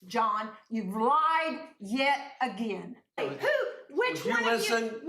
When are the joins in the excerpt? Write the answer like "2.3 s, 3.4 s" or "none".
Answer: 3.2 s